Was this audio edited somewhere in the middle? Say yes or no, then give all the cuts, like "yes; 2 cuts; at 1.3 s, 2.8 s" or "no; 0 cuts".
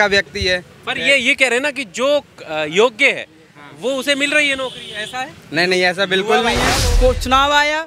yes; 1 cut; at 6.9 s